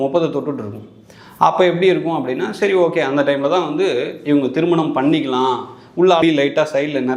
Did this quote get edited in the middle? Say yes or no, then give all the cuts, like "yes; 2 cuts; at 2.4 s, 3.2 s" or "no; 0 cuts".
yes; 1 cut; at 6.2 s